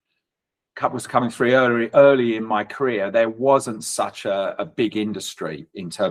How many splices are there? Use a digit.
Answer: 0